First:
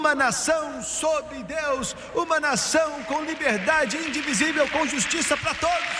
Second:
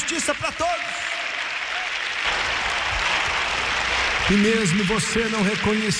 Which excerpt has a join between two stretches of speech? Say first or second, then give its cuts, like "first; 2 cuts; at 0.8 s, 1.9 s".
second; 1 cut; at 2.2 s